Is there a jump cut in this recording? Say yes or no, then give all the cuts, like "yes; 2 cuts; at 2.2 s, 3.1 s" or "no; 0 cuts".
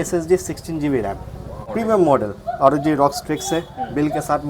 yes; 1 cut; at 1.6 s